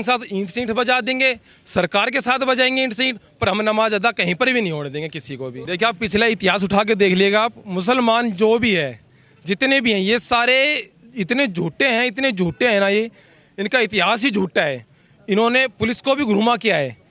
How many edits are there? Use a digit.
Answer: 0